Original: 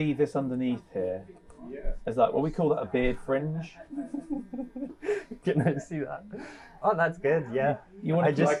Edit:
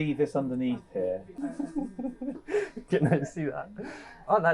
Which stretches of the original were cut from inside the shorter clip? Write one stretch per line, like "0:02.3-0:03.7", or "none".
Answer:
0:01.4-0:03.9